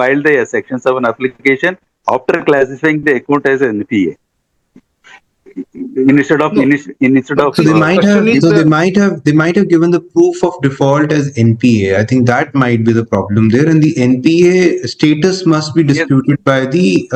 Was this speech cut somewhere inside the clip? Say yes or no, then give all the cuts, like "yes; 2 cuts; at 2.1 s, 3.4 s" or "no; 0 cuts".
no; 0 cuts